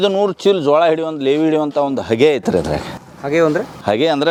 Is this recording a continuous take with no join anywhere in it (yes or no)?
yes